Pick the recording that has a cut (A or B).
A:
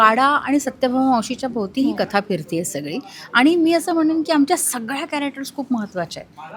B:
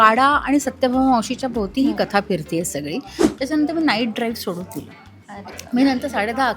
B